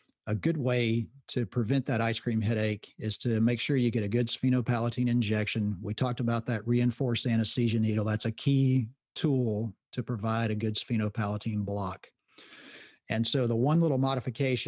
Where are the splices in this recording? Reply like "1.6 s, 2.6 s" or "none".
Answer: none

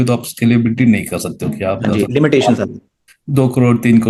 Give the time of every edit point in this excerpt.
none

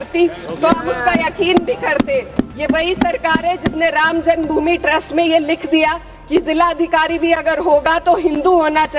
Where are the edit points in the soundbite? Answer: 2.3 s

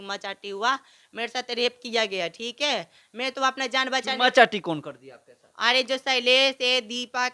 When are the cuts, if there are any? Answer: none

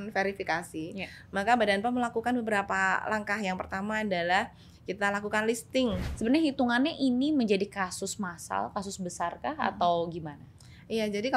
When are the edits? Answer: 6.0 s

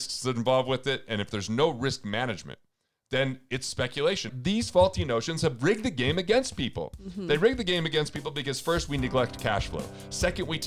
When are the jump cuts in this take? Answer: 4.3 s

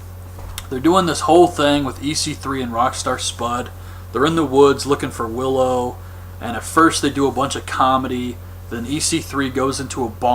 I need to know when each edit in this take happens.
4.6 s

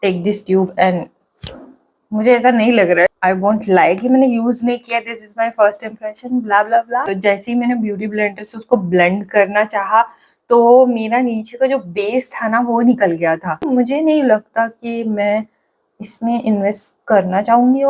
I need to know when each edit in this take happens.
3.2 s, 7.1 s, 13.6 s

